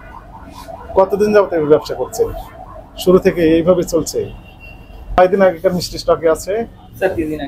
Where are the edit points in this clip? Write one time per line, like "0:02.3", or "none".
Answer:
0:05.2